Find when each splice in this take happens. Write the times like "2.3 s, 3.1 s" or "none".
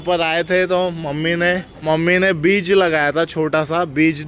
1.8 s

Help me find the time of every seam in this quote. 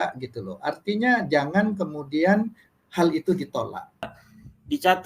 4.0 s

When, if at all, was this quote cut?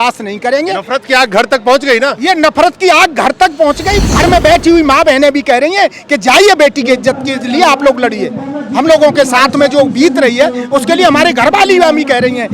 4.0 s

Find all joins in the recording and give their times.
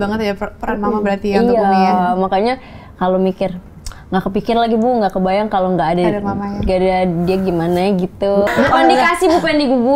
8.5 s

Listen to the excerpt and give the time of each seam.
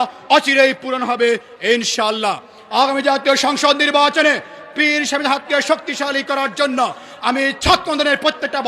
2.6 s

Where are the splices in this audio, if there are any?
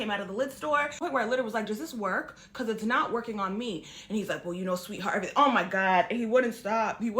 4.9 s

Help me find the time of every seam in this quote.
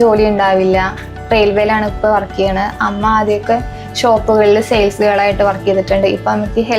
none

